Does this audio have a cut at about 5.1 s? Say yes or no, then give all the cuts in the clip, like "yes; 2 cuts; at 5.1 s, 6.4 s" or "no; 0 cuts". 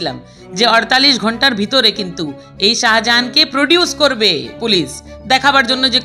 no; 0 cuts